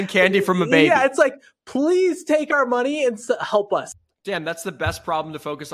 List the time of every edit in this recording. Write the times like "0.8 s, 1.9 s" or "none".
3.9 s